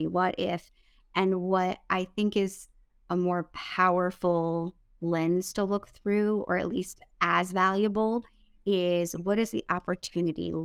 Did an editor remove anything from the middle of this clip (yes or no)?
no